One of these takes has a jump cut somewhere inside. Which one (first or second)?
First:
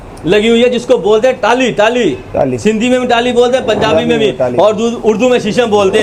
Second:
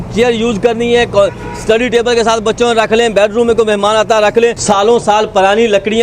second